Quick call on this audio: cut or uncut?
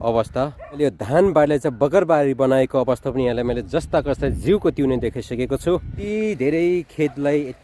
cut